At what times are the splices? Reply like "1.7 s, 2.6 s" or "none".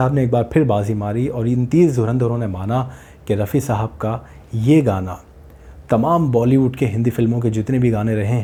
none